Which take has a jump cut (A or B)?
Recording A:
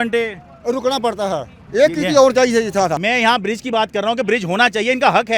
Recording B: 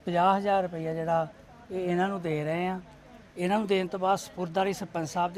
A